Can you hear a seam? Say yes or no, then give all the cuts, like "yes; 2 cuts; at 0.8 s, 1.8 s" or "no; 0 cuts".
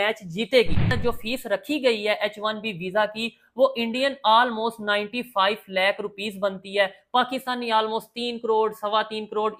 yes; 1 cut; at 1.0 s